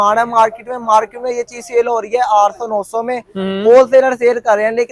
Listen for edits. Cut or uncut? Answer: uncut